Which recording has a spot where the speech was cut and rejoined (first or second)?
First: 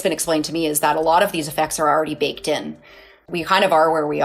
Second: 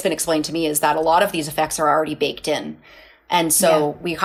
first